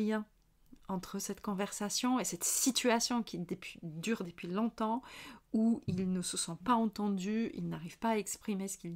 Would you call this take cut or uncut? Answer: uncut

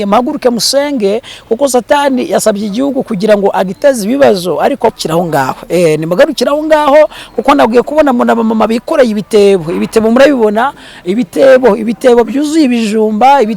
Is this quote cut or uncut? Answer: cut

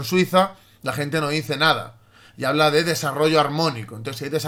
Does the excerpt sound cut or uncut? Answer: uncut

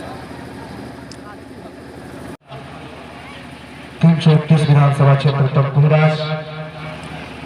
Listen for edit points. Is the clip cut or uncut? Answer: cut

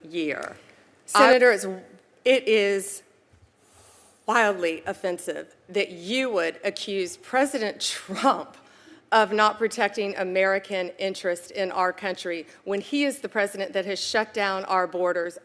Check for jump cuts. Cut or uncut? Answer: cut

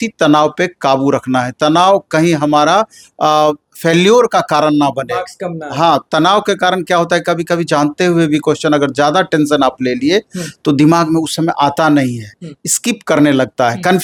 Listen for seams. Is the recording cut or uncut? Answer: uncut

